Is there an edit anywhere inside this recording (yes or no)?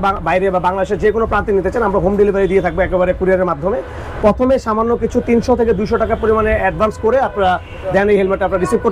no